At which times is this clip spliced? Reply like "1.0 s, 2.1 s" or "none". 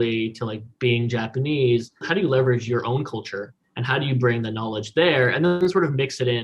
2.0 s, 3.7 s, 5.6 s